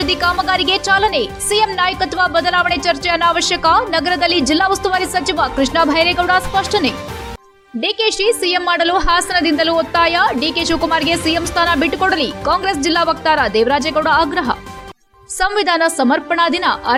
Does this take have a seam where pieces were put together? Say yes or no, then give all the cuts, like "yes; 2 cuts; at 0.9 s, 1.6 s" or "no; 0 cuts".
no; 0 cuts